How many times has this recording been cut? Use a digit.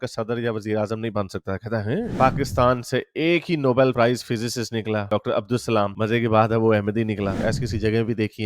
2